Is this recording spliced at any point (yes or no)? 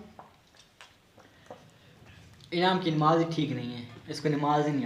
no